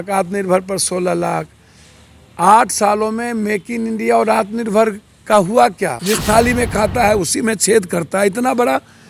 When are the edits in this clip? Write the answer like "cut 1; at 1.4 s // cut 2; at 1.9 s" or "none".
cut 1; at 6.0 s